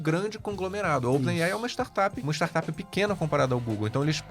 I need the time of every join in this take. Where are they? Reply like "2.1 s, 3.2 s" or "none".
2.2 s